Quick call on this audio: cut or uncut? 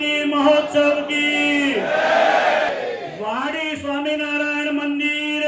cut